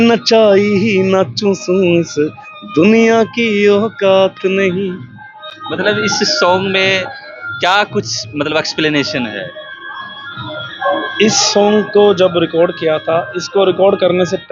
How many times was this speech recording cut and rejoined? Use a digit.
0